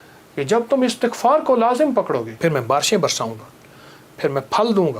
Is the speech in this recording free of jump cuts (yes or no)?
no